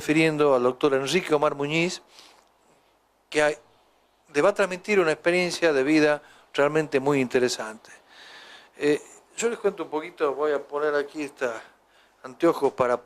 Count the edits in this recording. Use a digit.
1